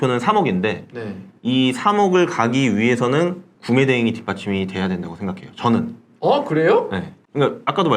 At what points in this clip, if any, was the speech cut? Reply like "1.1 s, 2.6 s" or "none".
none